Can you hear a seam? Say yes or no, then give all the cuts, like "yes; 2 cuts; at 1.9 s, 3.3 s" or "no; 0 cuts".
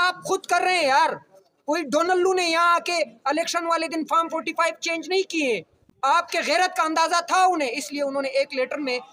no; 0 cuts